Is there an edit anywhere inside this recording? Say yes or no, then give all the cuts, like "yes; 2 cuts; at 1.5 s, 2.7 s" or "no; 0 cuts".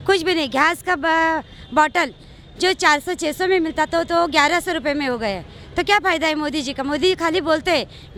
no; 0 cuts